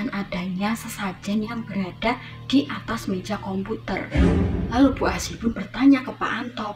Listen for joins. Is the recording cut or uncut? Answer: uncut